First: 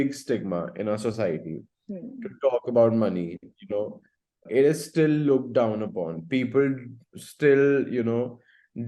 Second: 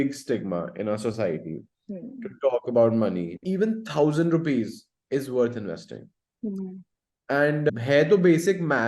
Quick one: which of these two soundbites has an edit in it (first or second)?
second